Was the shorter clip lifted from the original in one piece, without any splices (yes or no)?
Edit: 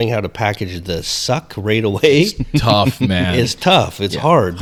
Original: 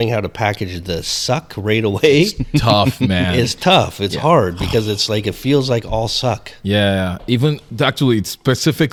yes